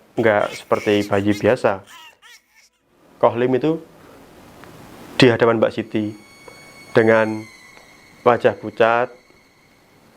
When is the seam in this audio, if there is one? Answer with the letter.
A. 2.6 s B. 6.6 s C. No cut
A